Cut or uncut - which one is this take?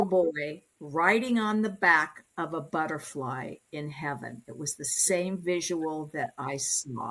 uncut